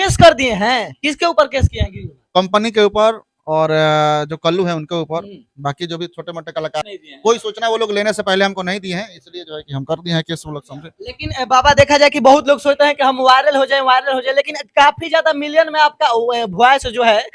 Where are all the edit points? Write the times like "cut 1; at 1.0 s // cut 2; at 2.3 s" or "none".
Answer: cut 1; at 6.8 s

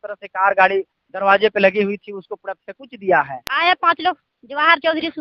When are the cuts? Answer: cut 1; at 3.4 s

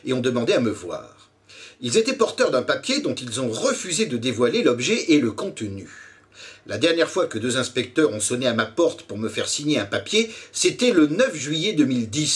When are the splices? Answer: cut 1; at 2.3 s

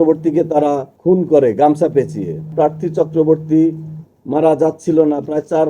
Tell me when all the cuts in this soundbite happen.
cut 1; at 0.9 s // cut 2; at 2.5 s

